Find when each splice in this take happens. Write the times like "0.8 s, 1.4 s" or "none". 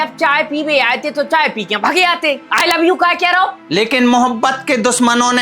3.6 s